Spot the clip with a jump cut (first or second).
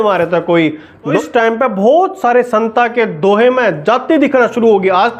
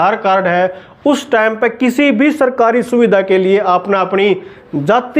first